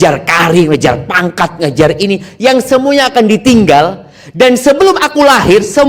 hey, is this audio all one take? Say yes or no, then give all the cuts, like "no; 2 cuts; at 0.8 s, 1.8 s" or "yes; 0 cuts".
yes; 0 cuts